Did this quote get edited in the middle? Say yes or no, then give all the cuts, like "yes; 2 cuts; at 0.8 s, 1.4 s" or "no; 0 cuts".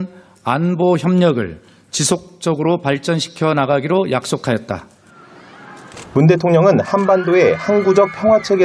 yes; 1 cut; at 1.9 s